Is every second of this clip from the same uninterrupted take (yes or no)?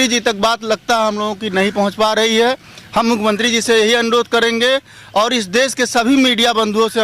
yes